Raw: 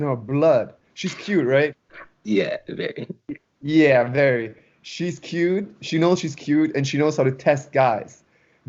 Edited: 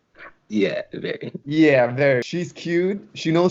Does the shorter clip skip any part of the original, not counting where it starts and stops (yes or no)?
yes